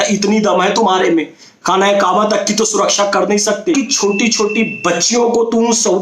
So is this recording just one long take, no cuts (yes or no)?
no